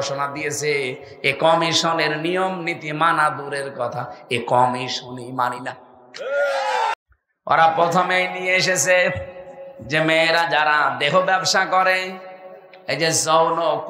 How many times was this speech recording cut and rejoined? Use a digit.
1